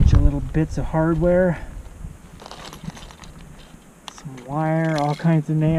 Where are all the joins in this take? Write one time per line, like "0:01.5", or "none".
none